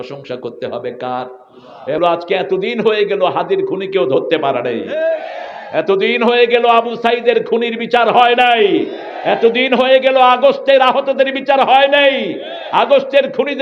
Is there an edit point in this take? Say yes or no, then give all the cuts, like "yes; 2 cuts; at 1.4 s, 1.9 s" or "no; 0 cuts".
yes; 1 cut; at 2.0 s